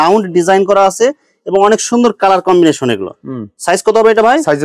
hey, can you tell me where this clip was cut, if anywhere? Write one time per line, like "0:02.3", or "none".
none